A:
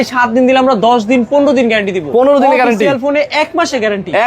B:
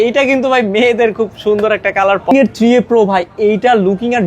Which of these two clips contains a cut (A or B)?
B